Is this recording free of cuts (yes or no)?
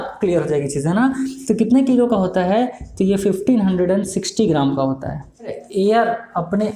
no